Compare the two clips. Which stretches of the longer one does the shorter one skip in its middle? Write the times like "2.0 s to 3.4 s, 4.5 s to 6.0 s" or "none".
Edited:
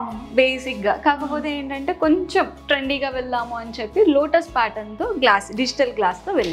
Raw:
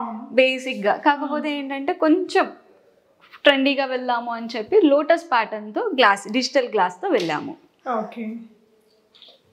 2.7 s to 3.4 s